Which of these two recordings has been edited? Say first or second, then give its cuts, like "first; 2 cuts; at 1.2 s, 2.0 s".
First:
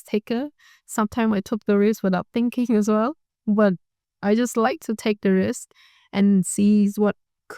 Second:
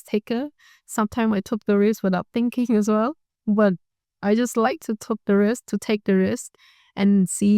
first; 1 cut; at 5.0 s